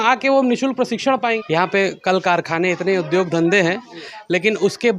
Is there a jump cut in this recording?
yes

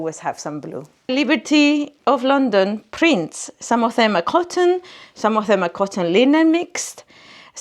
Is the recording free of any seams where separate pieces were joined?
no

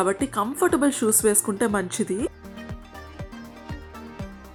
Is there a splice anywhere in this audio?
no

